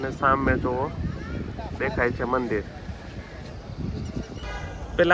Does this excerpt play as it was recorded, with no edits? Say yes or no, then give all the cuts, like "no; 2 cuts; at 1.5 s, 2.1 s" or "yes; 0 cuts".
yes; 0 cuts